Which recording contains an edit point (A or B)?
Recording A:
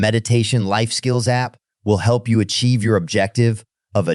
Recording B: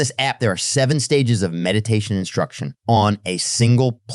B